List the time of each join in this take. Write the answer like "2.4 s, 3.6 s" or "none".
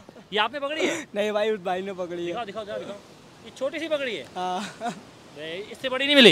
none